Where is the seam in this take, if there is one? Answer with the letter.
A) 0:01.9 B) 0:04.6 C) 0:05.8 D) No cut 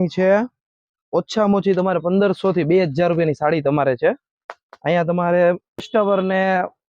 C